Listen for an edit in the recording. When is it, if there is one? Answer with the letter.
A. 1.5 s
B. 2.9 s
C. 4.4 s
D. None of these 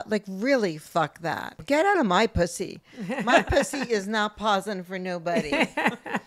A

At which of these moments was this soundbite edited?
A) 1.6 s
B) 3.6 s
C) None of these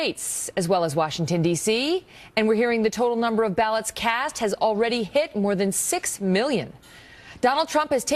A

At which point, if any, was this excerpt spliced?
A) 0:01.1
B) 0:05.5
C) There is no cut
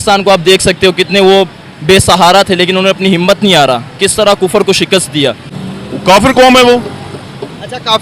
B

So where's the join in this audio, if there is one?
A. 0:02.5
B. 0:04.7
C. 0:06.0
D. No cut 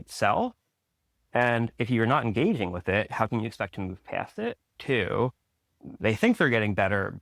B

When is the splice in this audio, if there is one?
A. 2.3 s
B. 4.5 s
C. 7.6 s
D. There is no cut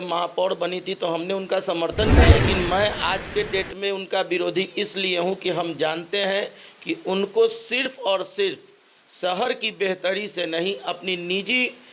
A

